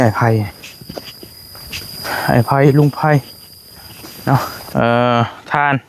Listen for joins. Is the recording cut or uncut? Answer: cut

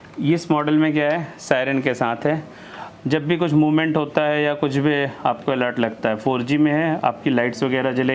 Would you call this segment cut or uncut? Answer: uncut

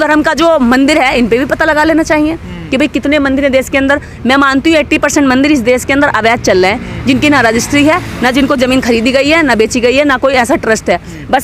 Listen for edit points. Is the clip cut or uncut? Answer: uncut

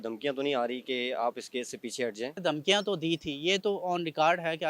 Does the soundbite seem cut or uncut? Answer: cut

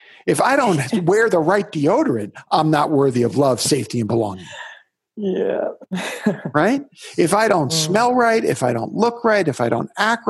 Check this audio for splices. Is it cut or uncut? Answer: uncut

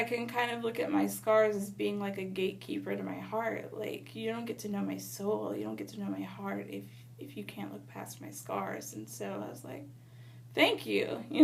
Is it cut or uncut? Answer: uncut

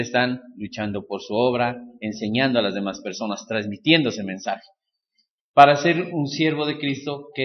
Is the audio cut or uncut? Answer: uncut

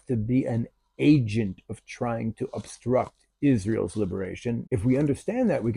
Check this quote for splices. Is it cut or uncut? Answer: cut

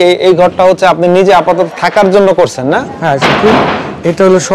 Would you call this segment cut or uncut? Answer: uncut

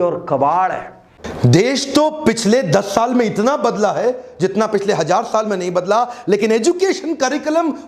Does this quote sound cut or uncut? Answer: cut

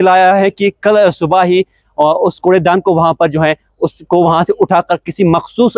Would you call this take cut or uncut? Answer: uncut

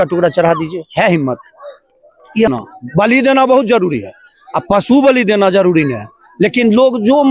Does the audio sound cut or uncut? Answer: cut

